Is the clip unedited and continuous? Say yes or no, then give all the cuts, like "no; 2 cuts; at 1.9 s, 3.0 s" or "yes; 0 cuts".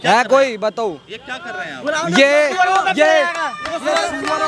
yes; 0 cuts